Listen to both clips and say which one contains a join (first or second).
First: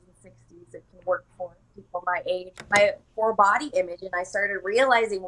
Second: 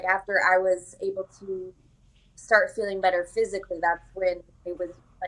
first